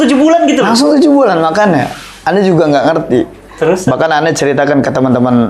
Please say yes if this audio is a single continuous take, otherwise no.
yes